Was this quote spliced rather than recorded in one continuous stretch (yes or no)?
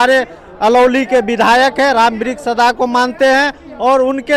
no